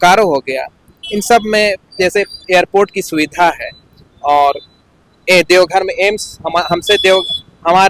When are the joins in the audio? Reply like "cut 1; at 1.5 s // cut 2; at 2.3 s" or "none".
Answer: none